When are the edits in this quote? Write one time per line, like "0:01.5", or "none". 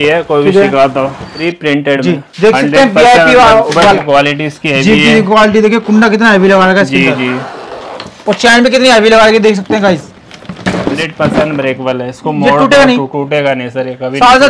0:01.3
0:04.0
0:11.0